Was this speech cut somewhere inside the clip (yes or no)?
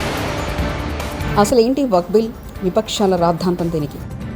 yes